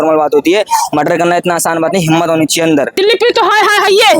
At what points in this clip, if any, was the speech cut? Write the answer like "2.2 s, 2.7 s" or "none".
2.9 s